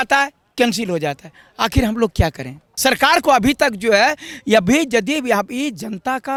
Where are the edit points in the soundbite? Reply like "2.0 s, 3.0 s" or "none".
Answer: none